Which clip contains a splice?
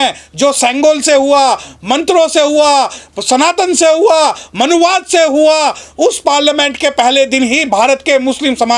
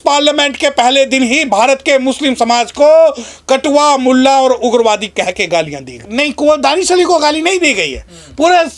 second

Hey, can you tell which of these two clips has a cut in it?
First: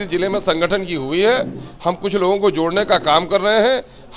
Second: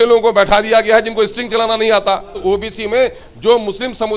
second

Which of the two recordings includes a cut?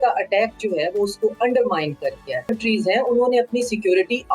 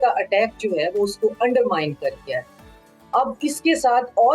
first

